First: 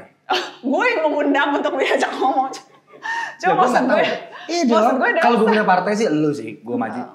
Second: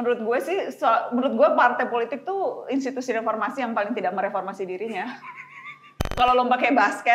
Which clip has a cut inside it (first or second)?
second